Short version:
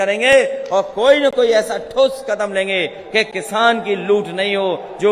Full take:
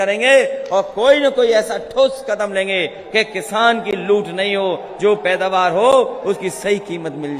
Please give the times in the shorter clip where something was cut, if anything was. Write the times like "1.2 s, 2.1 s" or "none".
none